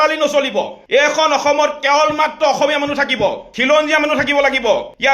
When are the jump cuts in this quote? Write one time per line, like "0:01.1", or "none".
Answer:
none